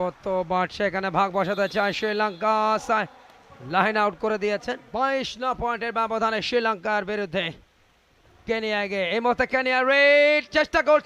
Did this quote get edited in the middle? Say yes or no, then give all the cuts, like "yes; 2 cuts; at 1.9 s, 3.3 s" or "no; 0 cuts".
yes; 1 cut; at 4.8 s